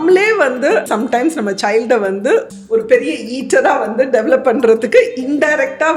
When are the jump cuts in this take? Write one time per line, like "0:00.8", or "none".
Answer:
0:00.9
0:02.5